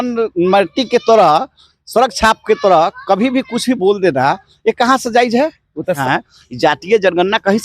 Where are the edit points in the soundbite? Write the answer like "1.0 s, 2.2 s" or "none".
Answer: 6.0 s

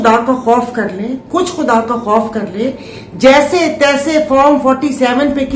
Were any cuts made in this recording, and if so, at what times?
none

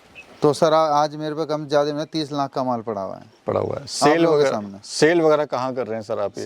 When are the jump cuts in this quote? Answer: none

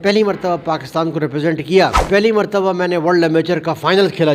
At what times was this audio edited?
2.0 s

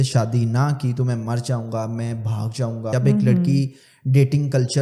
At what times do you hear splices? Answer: 2.9 s

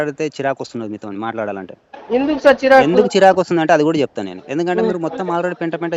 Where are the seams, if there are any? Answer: none

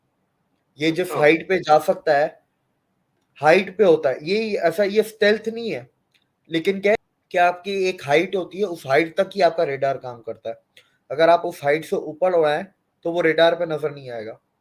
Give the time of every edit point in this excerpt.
7.0 s

